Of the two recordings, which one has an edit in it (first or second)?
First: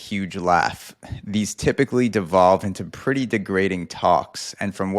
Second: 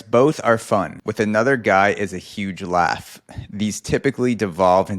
second